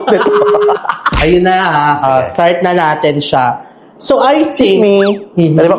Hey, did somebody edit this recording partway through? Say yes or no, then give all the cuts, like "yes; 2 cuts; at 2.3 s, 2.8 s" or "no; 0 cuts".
no; 0 cuts